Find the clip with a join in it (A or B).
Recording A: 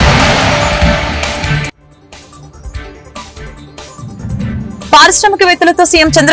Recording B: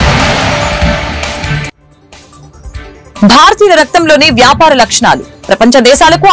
A